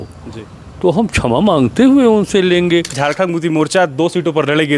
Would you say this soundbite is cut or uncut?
cut